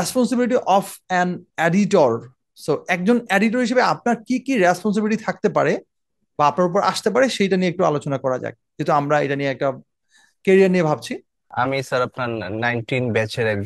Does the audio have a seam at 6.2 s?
no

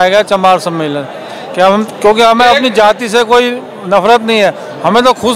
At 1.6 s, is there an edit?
no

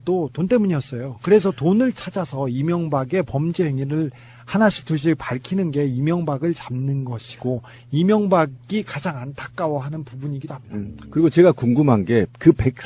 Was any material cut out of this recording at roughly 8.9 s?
no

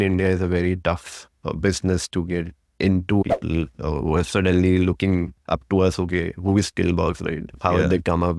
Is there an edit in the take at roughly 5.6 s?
no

